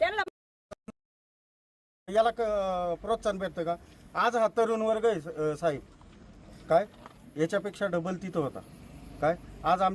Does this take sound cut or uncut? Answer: uncut